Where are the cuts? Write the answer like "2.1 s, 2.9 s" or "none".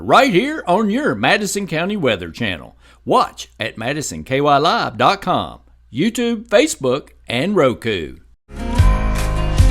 8.6 s

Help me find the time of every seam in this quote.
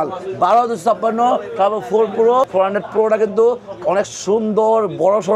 2.5 s

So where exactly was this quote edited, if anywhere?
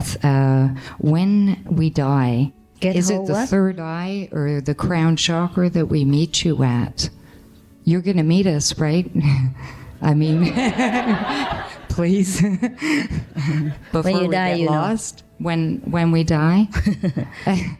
2.7 s

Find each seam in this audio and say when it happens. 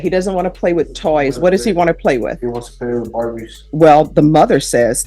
3.6 s

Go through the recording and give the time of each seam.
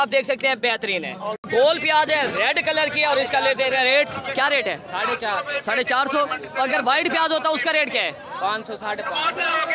1.5 s

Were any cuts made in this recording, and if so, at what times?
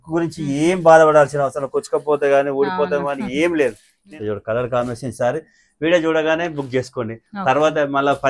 3.9 s

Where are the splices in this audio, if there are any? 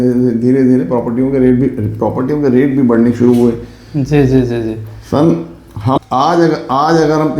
6.0 s

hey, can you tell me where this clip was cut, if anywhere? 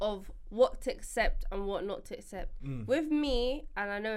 none

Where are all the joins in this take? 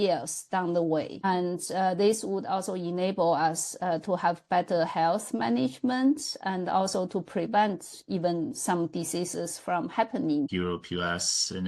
10.5 s

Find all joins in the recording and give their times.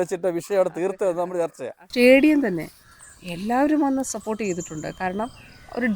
1.9 s

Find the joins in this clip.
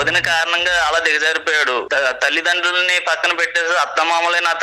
1.9 s

